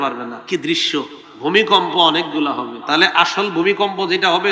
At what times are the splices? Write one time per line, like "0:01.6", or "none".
0:01.2
0:02.8